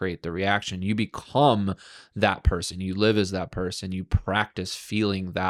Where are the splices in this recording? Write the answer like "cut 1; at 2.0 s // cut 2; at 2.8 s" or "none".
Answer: none